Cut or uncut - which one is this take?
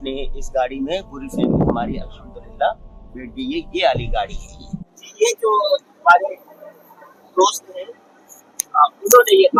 uncut